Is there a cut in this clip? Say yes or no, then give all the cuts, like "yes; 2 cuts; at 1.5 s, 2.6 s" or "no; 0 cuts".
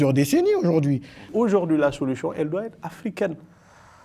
yes; 1 cut; at 1.2 s